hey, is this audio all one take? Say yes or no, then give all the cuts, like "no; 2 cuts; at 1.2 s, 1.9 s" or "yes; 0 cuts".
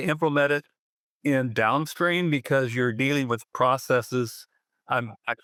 yes; 0 cuts